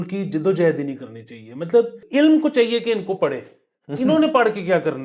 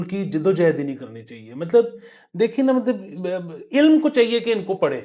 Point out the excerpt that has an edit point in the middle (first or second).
first